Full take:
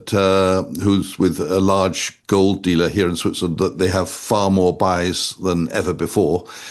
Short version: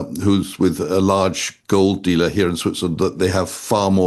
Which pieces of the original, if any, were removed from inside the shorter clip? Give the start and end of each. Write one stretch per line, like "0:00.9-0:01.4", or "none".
none